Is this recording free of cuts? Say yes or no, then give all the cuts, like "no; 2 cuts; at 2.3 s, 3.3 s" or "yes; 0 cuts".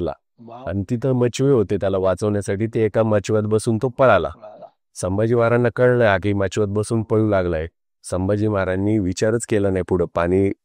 yes; 0 cuts